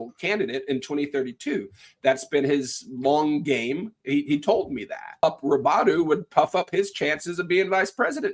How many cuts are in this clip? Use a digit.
1